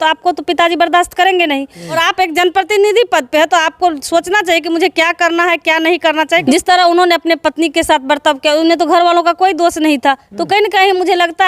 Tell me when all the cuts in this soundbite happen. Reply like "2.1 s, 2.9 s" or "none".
2.0 s, 6.4 s